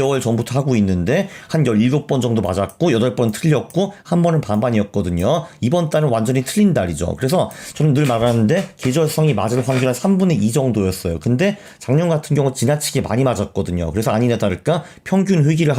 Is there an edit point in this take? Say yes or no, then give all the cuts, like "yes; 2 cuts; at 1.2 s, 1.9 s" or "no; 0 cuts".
no; 0 cuts